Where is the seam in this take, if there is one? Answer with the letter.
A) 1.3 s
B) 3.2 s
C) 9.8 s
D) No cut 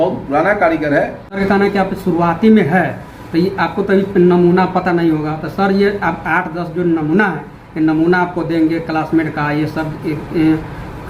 A